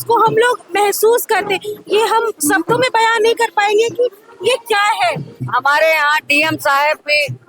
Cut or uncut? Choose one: cut